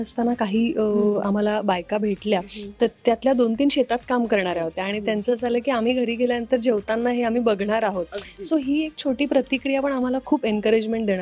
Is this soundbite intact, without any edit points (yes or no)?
yes